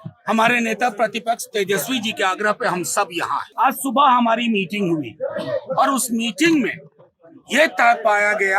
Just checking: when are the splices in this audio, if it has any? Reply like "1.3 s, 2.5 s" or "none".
3.5 s